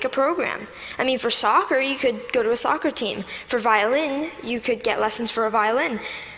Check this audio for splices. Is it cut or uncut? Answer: cut